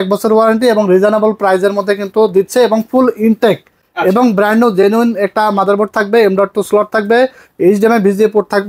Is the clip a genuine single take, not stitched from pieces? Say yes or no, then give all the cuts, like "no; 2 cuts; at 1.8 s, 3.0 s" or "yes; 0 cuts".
yes; 0 cuts